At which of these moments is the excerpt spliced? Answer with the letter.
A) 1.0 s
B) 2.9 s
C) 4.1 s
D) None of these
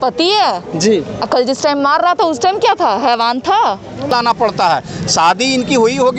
C